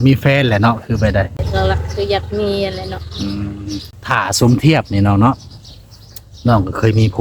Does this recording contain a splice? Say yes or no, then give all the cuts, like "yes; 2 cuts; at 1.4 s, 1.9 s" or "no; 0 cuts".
yes; 2 cuts; at 1.5 s, 3.9 s